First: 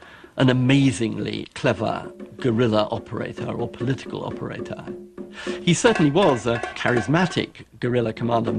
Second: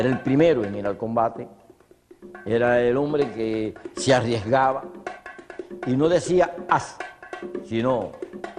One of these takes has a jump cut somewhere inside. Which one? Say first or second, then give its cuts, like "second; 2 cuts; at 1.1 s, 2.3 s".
second; 1 cut; at 3.1 s